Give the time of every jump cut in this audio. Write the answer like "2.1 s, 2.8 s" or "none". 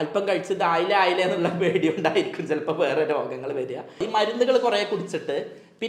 4.0 s